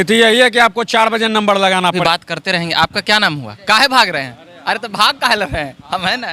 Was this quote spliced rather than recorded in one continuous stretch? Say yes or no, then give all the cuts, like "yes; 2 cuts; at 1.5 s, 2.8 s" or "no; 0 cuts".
yes; 1 cut; at 2.0 s